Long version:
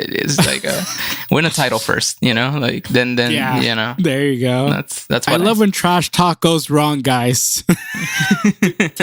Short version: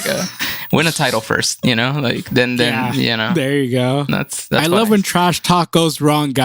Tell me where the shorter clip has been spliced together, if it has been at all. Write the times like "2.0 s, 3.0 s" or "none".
3.3 s